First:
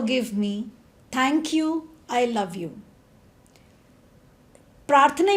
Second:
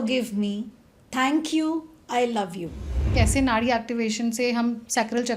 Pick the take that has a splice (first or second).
second